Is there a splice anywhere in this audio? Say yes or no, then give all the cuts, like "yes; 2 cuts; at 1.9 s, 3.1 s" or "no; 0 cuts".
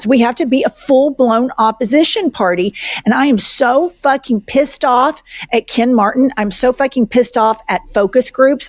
no; 0 cuts